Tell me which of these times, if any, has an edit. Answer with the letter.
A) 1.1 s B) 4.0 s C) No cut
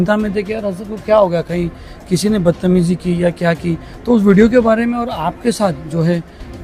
C